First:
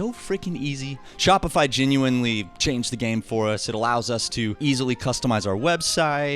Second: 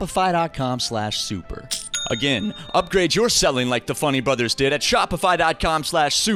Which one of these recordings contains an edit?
first; 2 cuts; at 1.0 s, 4.6 s

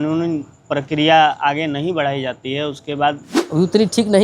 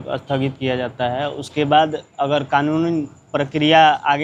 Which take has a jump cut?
first; 1 cut; at 3.3 s

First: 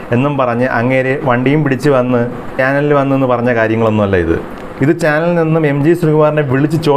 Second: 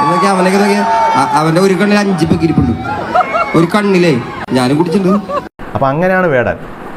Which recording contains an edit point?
first; 1 cut; at 2.5 s

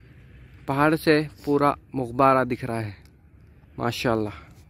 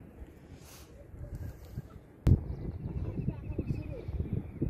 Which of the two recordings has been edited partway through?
second; 1 cut; at 2.2 s

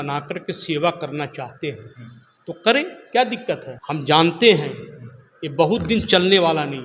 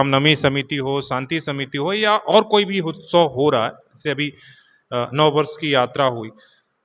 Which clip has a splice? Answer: first; 1 cut; at 3.7 s

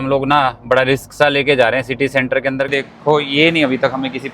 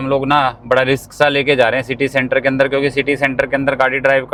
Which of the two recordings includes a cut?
first; 1 cut; at 2.7 s

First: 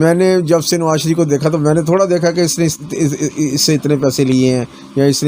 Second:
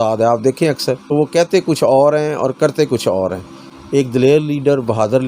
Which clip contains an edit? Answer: second; 2 cuts; at 1.1 s, 3.7 s

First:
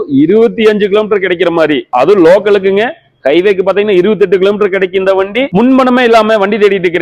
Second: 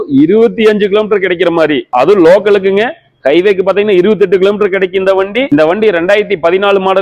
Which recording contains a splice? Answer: first; 1 cut; at 5.5 s

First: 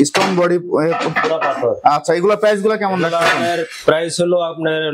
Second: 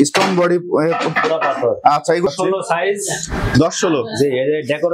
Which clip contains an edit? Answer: second; 1 cut; at 2.3 s

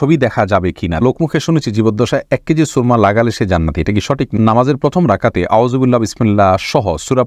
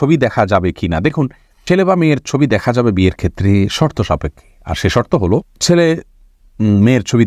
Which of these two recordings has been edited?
first; 2 cuts; at 1.0 s, 4.3 s

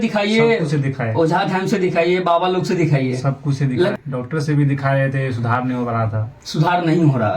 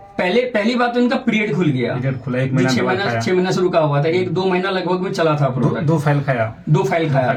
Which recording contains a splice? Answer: first; 1 cut; at 3.9 s

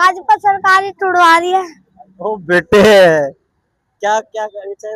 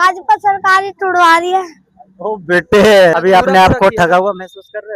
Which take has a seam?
second; 1 cut; at 3.1 s

